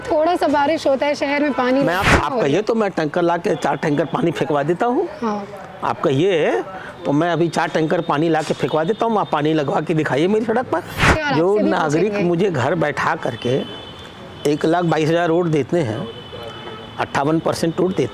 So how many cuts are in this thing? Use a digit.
2